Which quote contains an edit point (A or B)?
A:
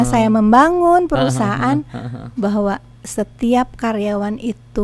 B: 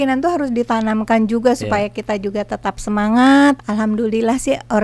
B